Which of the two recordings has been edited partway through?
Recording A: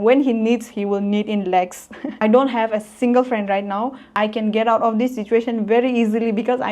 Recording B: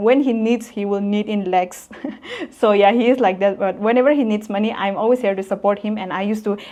A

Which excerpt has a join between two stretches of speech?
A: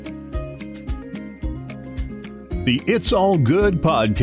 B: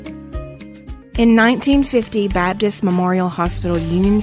A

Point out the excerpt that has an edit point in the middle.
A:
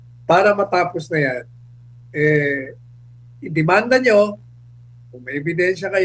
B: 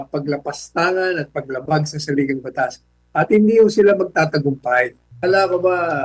B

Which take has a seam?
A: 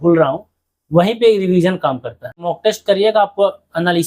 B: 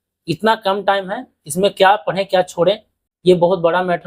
A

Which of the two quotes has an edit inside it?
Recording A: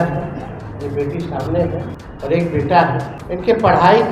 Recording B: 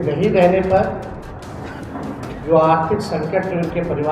A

